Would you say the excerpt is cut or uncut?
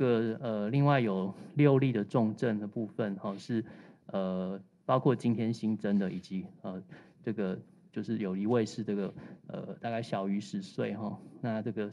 uncut